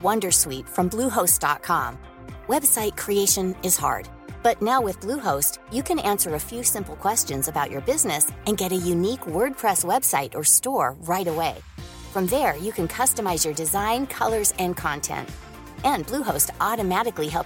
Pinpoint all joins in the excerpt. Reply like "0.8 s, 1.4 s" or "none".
none